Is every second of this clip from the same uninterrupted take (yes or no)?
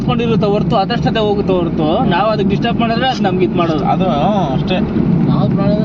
yes